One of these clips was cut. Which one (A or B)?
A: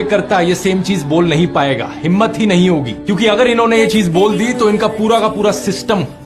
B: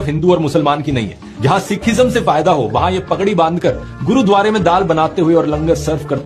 A